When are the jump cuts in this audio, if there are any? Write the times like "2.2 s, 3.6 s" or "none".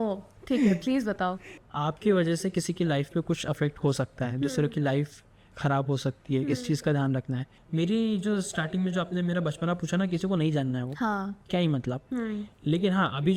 1.6 s, 7.5 s

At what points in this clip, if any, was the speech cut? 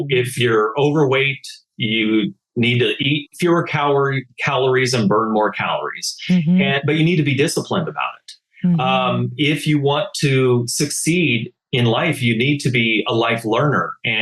none

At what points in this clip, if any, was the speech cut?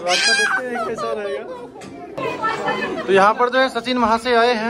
2.2 s

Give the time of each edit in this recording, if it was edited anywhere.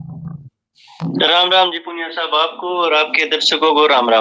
none

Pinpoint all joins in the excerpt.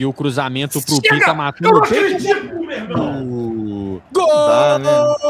none

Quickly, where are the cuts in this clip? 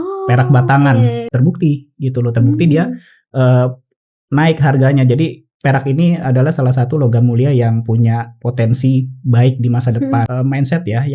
1.2 s, 10.3 s

